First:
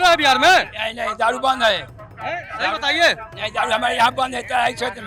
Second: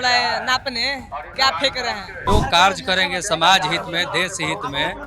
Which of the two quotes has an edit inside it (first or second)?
second